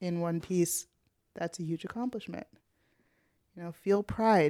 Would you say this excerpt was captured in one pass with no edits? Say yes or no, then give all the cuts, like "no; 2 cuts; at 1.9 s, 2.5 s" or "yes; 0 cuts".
yes; 0 cuts